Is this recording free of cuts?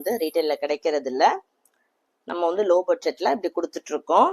yes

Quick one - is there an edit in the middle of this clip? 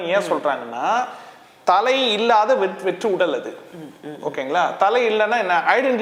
no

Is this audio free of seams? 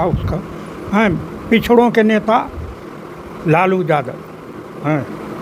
yes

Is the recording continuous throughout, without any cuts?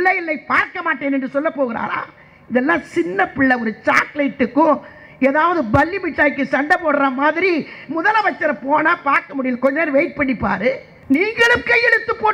no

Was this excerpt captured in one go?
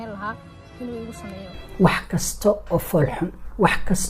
no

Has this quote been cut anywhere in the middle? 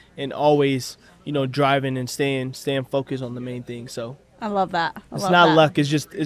no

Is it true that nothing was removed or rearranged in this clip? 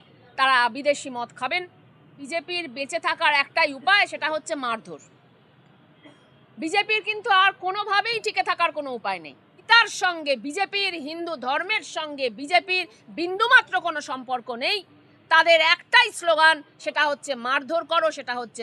no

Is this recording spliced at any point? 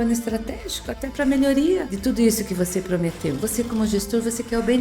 yes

